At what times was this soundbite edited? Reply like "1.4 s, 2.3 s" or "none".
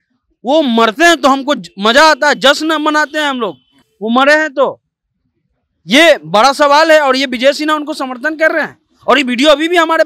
none